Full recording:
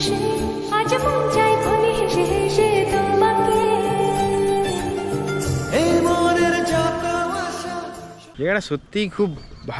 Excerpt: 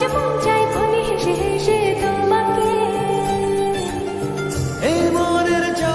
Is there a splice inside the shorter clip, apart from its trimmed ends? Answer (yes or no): no